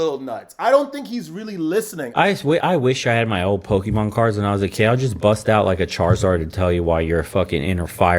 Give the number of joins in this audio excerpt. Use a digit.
1